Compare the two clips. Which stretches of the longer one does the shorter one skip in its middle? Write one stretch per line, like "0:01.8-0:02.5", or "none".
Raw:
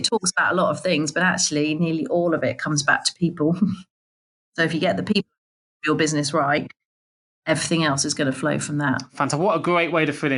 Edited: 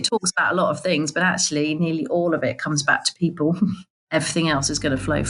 0:03.9-0:07.3